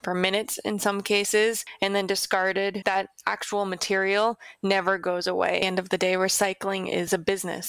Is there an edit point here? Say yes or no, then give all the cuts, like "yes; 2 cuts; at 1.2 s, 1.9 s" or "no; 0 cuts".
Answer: yes; 2 cuts; at 2.8 s, 5.6 s